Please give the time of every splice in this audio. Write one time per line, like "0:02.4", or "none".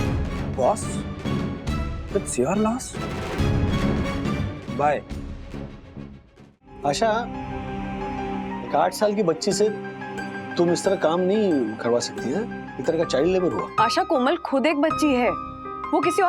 0:06.7
0:13.6

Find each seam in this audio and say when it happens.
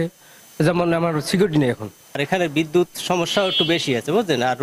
none

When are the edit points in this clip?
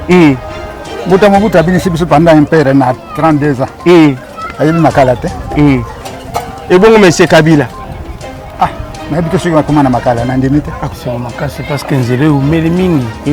0:10.9

